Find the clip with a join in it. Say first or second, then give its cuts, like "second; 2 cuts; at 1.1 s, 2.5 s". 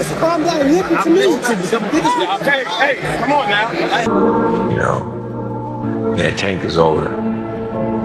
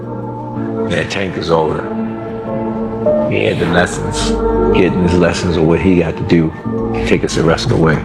first; 1 cut; at 3.9 s